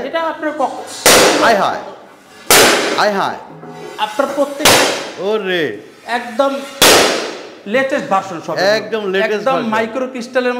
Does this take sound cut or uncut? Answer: uncut